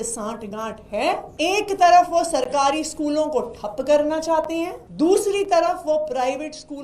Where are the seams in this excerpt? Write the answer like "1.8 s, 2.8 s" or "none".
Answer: 1.3 s, 4.8 s